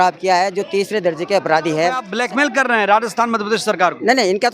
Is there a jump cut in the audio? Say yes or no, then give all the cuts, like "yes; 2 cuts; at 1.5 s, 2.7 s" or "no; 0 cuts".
yes; 1 cut; at 2.1 s